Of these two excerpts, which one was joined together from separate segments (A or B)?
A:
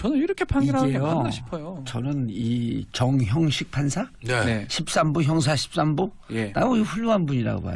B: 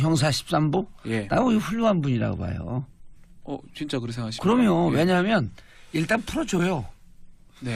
A